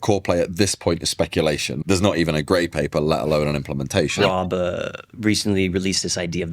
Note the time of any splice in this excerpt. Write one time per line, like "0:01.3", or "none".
0:01.7
0:04.1